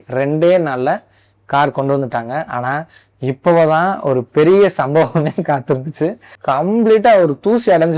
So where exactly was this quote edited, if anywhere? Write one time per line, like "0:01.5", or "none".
0:06.3